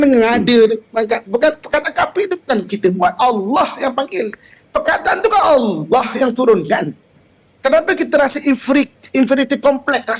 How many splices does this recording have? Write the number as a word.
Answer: zero